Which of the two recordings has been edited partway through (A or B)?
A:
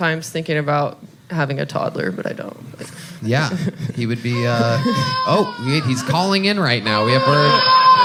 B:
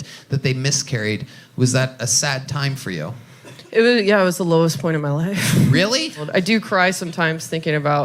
B